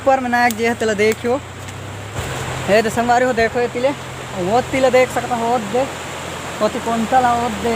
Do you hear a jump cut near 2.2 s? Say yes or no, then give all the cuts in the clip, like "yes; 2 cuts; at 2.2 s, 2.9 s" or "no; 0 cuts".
yes; 1 cut; at 2.2 s